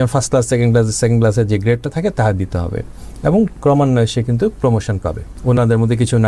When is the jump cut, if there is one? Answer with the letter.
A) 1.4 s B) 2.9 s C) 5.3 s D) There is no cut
C